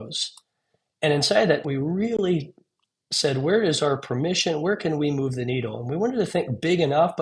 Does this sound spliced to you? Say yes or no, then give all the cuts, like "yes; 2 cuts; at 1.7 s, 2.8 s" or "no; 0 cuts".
yes; 1 cut; at 1.6 s